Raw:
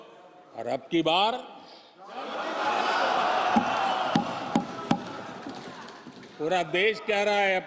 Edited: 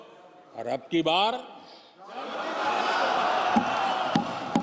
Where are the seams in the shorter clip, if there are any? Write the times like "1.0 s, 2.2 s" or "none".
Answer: none

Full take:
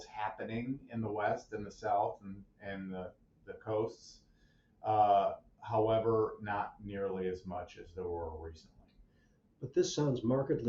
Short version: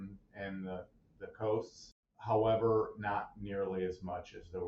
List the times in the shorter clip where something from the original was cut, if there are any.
2.1 s

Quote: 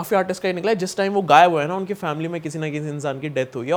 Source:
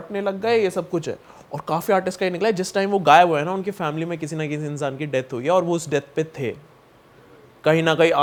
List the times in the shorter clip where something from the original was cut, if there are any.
none

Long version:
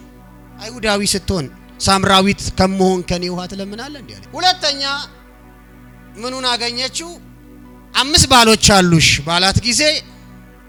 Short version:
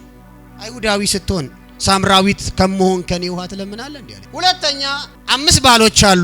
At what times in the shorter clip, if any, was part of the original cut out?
5.1 s

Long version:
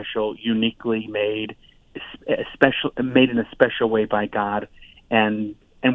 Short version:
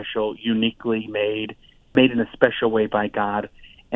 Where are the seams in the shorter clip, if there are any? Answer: 1.9 s

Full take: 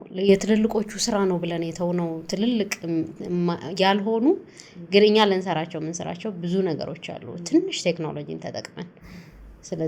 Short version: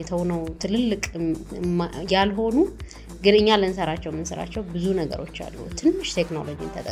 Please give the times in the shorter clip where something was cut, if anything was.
none

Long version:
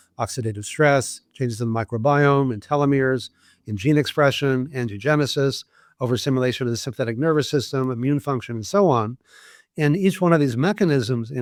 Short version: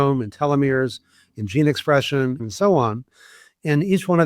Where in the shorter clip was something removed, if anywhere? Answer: 2.4 s

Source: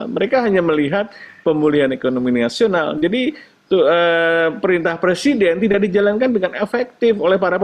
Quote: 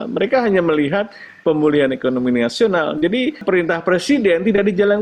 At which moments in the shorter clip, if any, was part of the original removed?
3.4 s

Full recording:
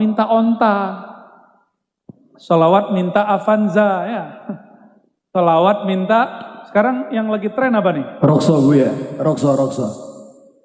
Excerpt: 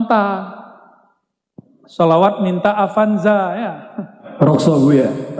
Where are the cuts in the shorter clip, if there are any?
4.2 s

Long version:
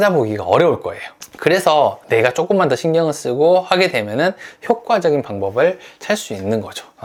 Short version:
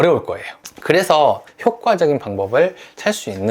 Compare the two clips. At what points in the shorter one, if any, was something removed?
1.4 s

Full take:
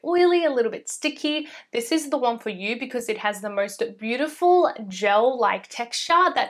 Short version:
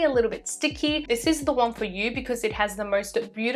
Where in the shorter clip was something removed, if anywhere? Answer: 1.0 s

